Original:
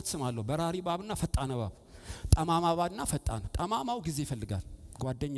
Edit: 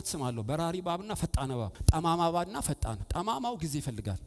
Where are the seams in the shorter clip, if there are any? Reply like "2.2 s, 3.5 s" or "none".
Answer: 1.7 s